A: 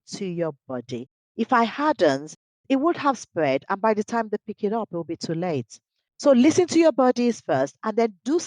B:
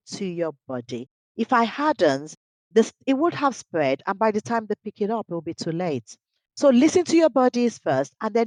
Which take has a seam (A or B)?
A